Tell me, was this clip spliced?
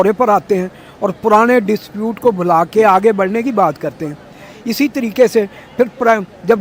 no; 0 cuts

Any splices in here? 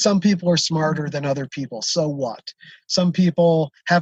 no; 0 cuts

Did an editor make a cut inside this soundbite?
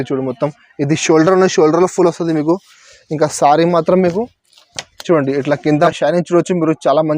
yes; 1 cut; at 5.9 s

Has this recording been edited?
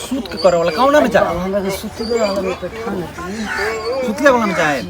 no; 0 cuts

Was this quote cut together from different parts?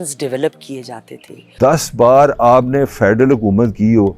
yes; 1 cut; at 1.5 s

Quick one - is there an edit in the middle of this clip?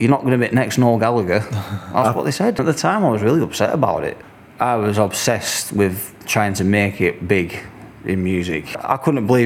yes; 3 cuts; at 2.6 s, 4.2 s, 8.7 s

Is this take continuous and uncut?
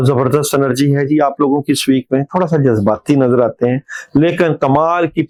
yes; 0 cuts

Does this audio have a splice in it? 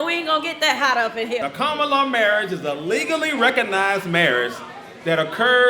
yes; 1 cut; at 1.4 s

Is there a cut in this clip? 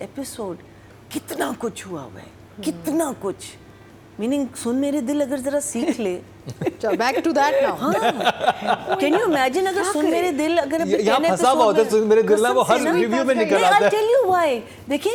no; 0 cuts

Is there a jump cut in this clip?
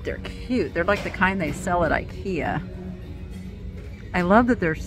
no; 0 cuts

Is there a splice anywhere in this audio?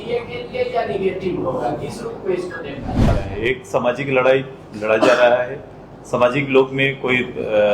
yes; 1 cut; at 3.2 s

